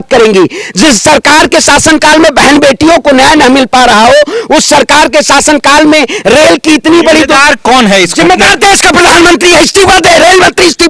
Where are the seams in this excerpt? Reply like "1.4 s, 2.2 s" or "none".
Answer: none